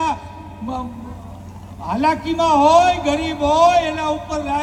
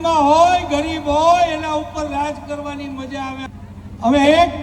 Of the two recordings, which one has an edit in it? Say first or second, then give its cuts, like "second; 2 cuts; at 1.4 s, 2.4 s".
second; 1 cut; at 3.4 s